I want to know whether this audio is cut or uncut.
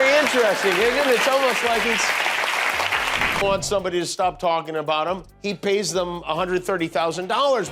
cut